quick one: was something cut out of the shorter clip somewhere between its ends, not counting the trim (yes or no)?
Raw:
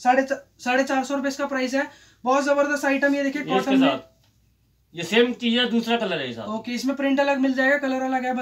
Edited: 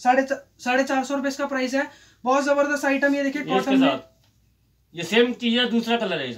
no